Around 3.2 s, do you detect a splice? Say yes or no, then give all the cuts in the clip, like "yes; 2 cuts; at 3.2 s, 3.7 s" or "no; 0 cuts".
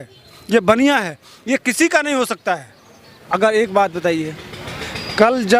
yes; 1 cut; at 3.2 s